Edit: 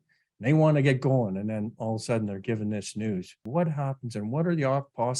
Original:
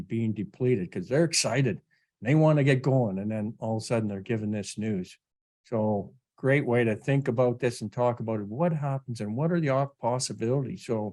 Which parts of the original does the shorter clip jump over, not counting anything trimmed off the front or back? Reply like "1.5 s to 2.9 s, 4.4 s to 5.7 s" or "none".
5.2 s to 8.5 s